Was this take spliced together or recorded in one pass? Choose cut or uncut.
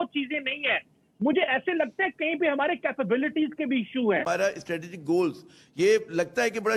uncut